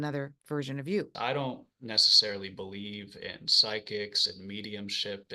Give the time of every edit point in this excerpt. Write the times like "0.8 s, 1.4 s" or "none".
1.1 s